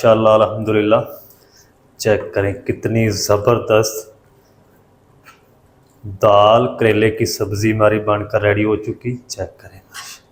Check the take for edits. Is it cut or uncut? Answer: uncut